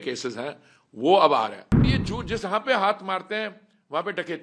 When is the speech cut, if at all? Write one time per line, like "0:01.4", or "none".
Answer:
0:01.7